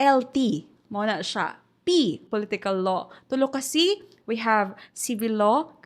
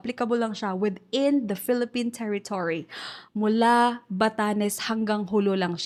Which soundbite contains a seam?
first; 1 cut; at 2.2 s

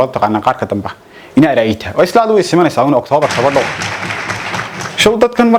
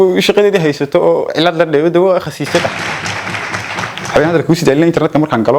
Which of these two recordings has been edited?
second; 2 cuts; at 2.7 s, 4.1 s

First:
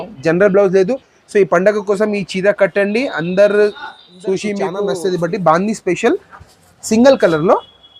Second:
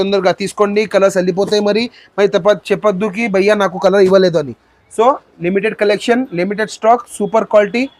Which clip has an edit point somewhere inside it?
first; 1 cut; at 4.8 s

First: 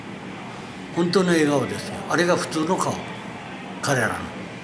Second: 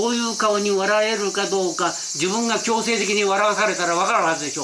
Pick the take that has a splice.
first; 1 cut; at 0.9 s

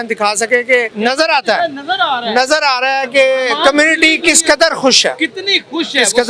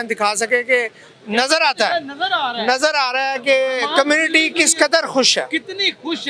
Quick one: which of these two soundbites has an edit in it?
first; 1 cut; at 0.9 s

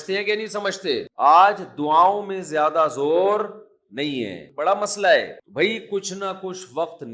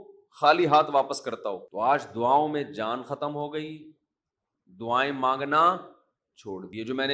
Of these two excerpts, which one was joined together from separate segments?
first; 1 cut; at 1.1 s

